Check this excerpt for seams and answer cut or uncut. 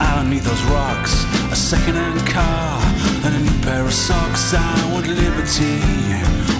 uncut